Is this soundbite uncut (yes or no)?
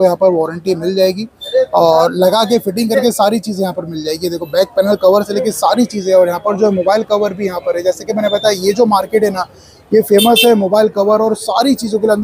yes